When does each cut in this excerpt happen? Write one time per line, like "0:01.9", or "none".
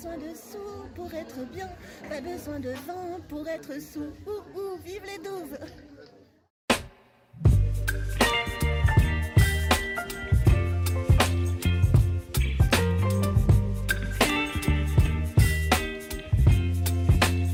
none

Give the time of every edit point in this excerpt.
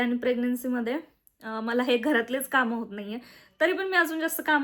none

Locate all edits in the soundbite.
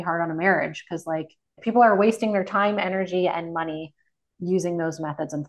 0:01.6

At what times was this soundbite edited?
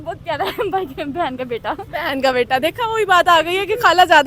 none

